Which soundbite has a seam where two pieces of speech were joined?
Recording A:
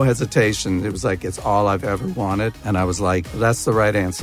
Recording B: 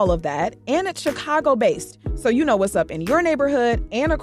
A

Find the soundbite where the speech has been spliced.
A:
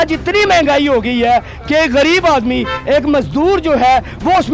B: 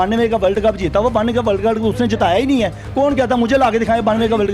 B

